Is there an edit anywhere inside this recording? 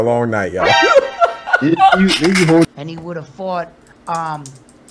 yes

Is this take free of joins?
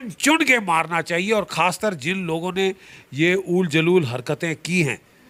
yes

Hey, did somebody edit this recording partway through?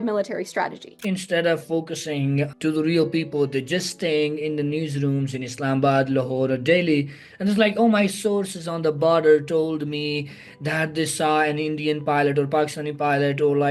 yes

